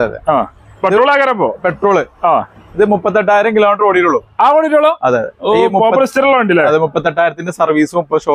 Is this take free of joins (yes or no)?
yes